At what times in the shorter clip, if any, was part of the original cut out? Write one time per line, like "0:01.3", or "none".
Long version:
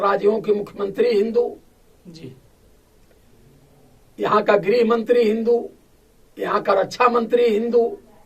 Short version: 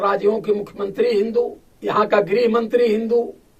0:01.7